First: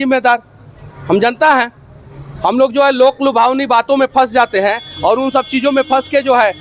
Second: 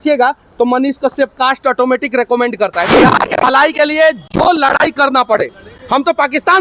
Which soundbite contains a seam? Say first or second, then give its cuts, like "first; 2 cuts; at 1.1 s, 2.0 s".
second; 1 cut; at 3.0 s